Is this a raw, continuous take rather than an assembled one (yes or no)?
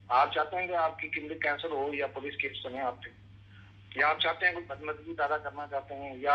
yes